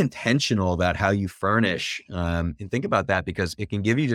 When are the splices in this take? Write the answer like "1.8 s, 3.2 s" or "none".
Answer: none